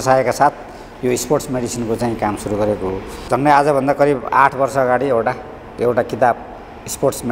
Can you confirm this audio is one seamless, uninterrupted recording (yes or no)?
no